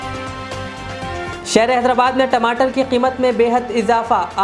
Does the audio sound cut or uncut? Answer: cut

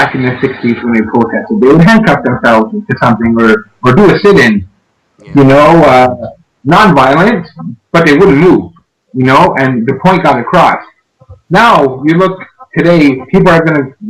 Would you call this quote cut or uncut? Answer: cut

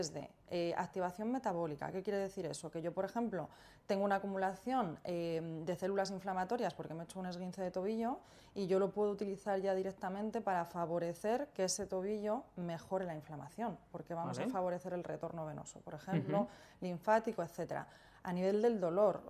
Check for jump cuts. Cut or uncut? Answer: uncut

